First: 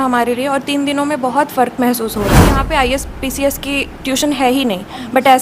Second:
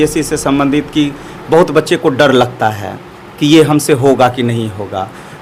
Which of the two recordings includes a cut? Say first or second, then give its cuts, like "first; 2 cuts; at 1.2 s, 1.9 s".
first; 1 cut; at 2.5 s